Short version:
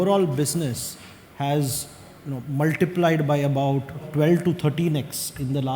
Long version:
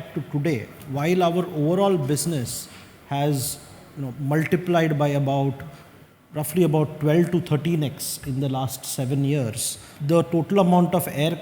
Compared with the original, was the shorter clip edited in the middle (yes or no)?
yes